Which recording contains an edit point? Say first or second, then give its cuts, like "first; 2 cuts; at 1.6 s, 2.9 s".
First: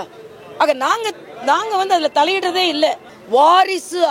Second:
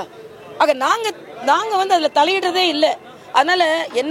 first; 1 cut; at 3.1 s